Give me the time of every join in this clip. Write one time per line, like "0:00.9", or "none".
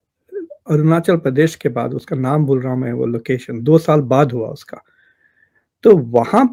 none